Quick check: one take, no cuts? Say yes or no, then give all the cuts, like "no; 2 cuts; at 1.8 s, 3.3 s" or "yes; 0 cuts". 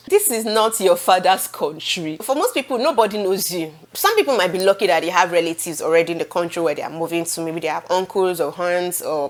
yes; 0 cuts